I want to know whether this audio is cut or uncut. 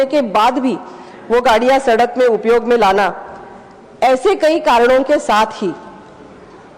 uncut